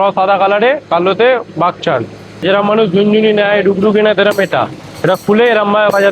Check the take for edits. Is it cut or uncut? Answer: cut